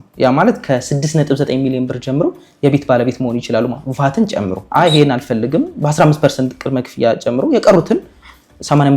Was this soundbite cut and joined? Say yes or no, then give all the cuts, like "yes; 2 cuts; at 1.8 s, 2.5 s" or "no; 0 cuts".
yes; 1 cut; at 4.7 s